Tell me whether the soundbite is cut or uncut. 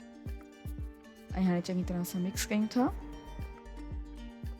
cut